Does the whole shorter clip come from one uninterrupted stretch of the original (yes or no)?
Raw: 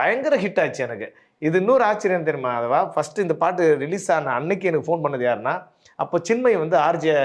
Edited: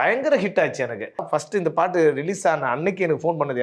no